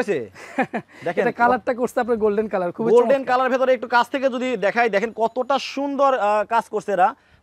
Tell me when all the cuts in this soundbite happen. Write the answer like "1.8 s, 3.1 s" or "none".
none